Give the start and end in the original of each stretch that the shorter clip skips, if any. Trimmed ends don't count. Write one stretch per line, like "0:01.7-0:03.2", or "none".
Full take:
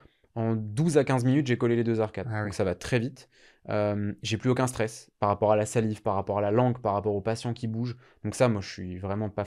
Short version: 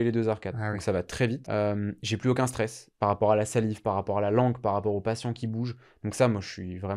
0:03.1-0:03.6